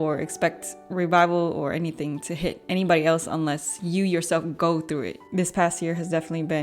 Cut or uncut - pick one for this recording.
cut